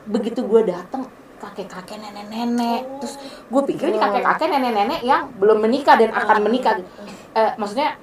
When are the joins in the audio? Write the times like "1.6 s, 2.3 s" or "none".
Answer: none